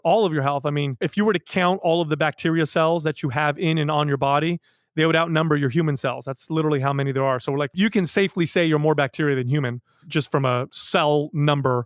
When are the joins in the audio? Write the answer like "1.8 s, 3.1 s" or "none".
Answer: none